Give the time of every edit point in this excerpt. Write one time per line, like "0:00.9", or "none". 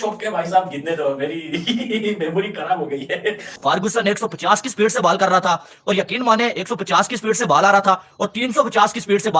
0:03.4